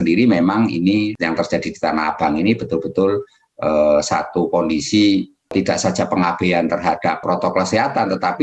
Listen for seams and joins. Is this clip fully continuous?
no; 3 cuts; at 1.1 s, 5.5 s, 7.2 s

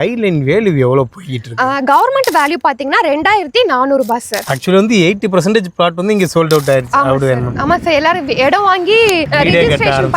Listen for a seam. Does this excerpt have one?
yes; 1 cut; at 4.4 s

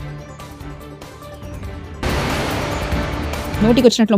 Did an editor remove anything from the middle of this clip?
yes; 1 cut; at 1.5 s

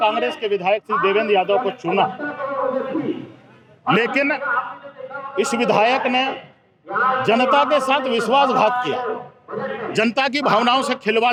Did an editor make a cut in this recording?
no; 0 cuts

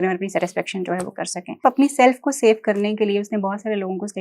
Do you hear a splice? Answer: yes; 1 cut; at 1.6 s

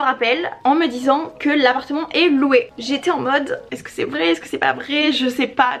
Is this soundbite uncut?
yes; 0 cuts

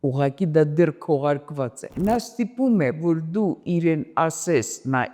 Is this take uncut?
no; 1 cut; at 1.9 s

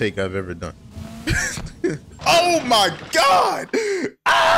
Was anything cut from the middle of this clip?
no; 0 cuts

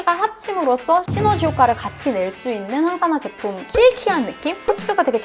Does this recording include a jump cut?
yes; 2 cuts; at 1.1 s, 3.7 s

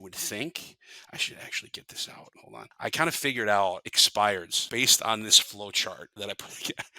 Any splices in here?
yes; 4 cuts; at 2.4 s, 3.9 s, 4.6 s, 6.1 s

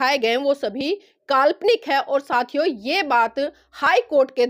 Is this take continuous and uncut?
yes; 0 cuts

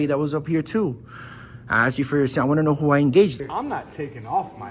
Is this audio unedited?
no; 1 cut; at 3.4 s

